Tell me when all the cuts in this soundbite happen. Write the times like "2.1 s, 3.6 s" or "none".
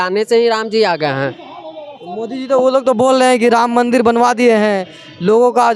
none

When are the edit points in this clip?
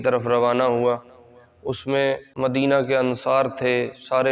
2.3 s

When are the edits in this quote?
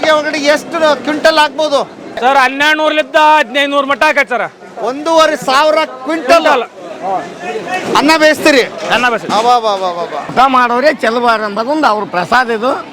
2.2 s, 10.3 s

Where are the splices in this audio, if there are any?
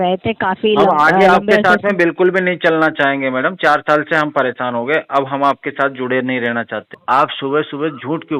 6.9 s

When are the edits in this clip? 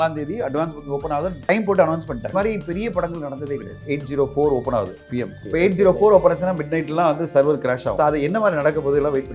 1.5 s, 2.3 s, 3.8 s, 5.4 s, 7.9 s

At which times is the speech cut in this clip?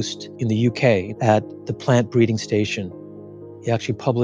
1.1 s, 3.3 s

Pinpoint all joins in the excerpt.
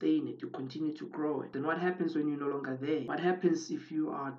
1.5 s, 3.1 s

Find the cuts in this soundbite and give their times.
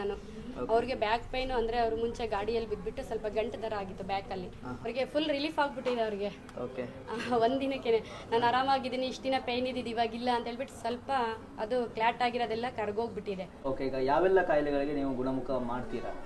4.9 s, 13.5 s

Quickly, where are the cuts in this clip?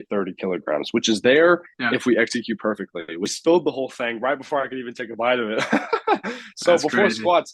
3.3 s

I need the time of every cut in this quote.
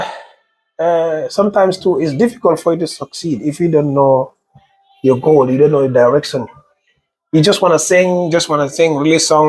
none

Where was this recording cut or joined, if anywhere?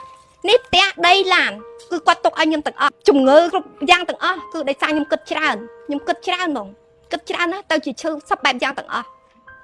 3.0 s, 3.5 s

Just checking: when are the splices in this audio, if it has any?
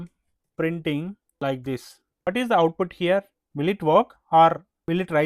none

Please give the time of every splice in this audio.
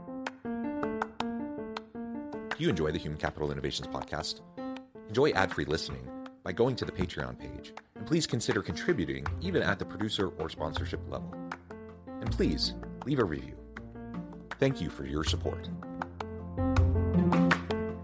none

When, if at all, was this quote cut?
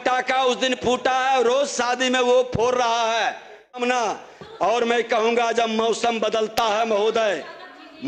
3.8 s

